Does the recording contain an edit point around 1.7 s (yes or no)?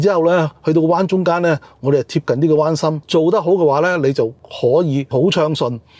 no